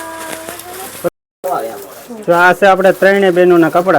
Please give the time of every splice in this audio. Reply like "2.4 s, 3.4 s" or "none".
1.1 s